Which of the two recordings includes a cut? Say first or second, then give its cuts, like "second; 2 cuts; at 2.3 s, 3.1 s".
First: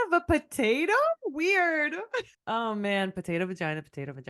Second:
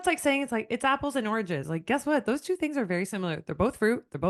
first; 1 cut; at 2.3 s